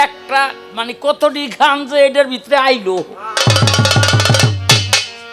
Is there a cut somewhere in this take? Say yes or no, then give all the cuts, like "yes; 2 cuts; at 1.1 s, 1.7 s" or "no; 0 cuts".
no; 0 cuts